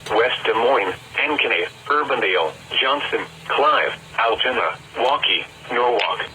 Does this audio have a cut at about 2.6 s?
no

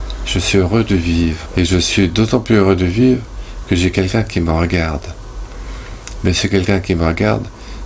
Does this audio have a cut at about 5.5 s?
no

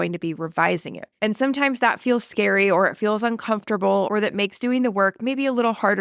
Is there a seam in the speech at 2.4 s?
no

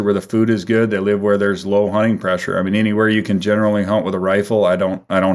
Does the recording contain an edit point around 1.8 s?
no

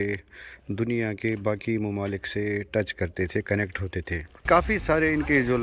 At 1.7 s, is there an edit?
no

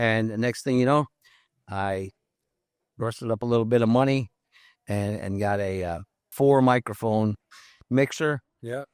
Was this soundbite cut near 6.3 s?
yes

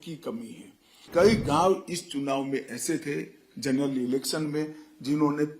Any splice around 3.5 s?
no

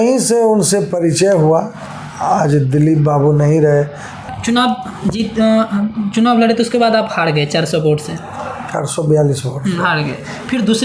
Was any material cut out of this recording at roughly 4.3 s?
yes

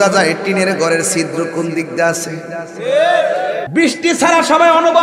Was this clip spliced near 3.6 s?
yes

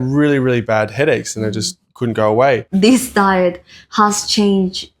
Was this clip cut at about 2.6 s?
yes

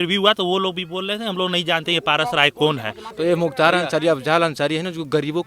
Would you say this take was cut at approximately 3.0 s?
yes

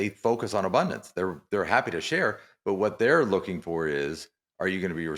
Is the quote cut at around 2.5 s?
no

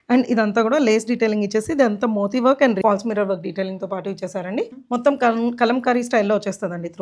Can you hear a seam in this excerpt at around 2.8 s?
yes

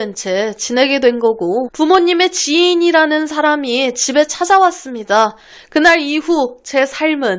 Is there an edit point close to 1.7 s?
yes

